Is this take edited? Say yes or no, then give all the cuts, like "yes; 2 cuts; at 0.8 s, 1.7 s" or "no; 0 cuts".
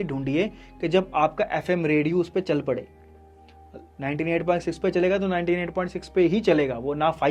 no; 0 cuts